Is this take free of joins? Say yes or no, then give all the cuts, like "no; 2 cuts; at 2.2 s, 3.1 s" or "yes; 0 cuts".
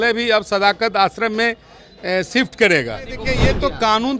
no; 1 cut; at 3.2 s